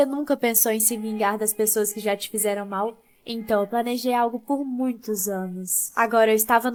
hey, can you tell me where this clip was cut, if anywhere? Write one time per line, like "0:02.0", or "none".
none